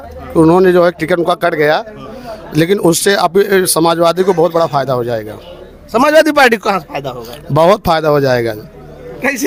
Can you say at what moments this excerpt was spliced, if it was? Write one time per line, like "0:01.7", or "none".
none